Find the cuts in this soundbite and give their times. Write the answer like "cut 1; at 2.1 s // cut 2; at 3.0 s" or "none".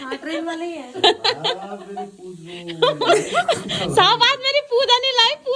none

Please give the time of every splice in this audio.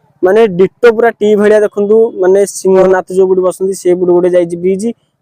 cut 1; at 2.8 s

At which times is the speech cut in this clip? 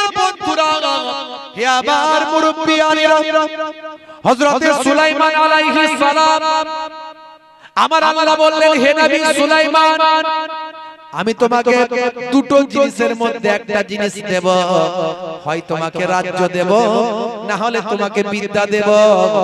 none

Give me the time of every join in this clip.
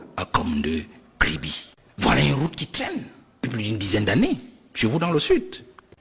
none

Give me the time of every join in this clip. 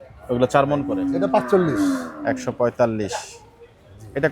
cut 1; at 0.9 s

